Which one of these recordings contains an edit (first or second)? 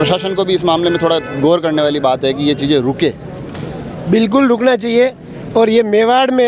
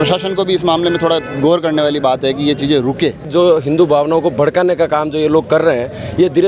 second